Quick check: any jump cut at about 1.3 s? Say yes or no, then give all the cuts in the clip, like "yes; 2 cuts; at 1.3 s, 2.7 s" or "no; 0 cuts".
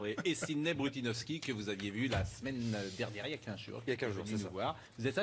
no; 1 cut; at 3.0 s